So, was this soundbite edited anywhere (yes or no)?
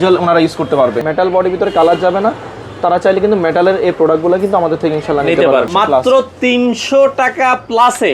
yes